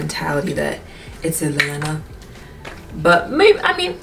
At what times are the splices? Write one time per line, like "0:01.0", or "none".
none